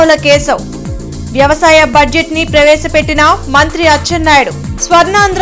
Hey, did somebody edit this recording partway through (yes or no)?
no